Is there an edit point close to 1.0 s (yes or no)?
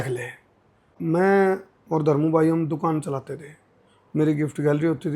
yes